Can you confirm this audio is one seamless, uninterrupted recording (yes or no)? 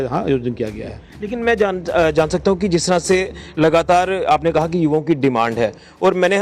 yes